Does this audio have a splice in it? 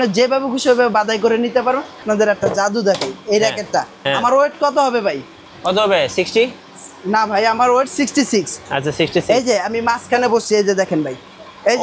yes; 1 cut; at 2.0 s

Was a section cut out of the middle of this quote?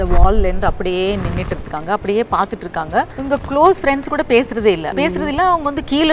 yes; 2 cuts; at 3.2 s, 4.9 s

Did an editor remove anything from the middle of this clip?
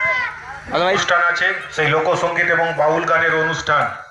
yes; 1 cut; at 1.0 s

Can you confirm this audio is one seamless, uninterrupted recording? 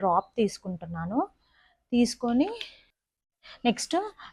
yes; 0 cuts

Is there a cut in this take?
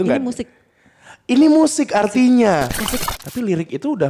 yes; 1 cut; at 3.0 s

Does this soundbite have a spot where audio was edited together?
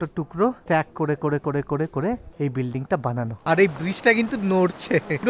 yes; 1 cut; at 3.4 s

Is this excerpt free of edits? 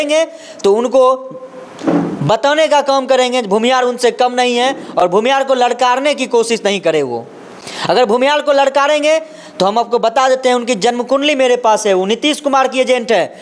yes; 0 cuts

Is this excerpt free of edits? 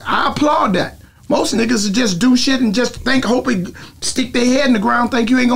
yes; 0 cuts

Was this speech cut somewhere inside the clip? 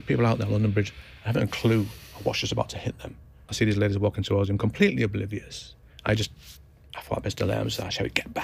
yes; 1 cut; at 3.5 s

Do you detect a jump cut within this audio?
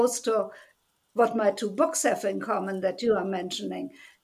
no; 0 cuts

